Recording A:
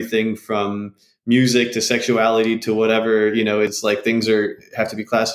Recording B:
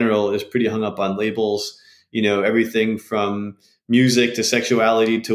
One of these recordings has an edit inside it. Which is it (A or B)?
A